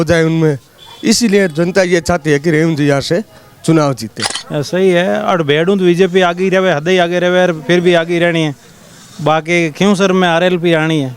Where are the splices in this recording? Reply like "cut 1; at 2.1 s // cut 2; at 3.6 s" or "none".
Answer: cut 1; at 4.4 s